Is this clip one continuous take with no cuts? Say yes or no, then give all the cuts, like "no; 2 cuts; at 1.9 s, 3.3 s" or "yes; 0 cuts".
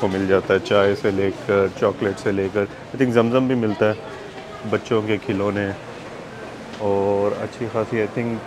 yes; 0 cuts